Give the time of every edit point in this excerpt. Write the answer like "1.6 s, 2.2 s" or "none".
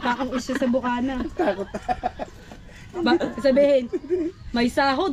none